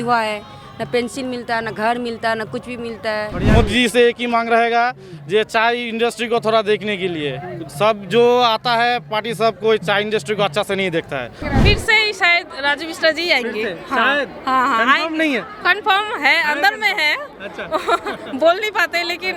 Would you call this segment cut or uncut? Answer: cut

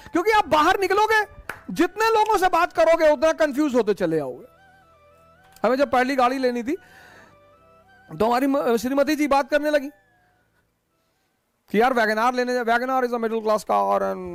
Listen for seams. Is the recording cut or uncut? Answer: uncut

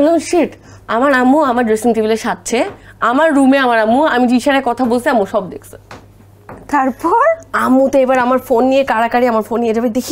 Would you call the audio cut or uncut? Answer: uncut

